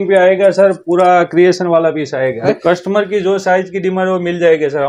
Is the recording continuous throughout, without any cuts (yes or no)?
no